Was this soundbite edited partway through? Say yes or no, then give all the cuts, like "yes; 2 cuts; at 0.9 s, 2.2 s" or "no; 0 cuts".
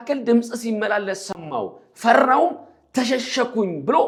no; 0 cuts